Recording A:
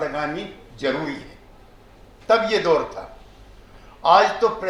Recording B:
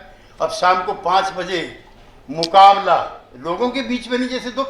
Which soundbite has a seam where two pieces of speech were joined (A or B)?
B